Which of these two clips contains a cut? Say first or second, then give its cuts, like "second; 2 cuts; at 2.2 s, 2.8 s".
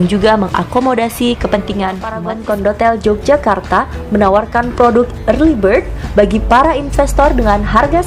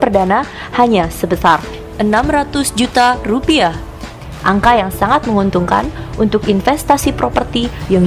first; 1 cut; at 2.3 s